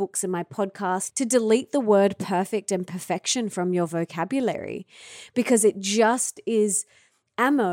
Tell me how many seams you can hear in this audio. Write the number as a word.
one